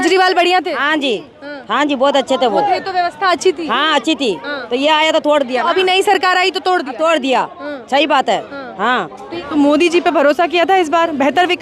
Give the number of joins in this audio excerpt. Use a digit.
1